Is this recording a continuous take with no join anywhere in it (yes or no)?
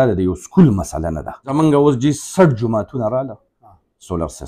no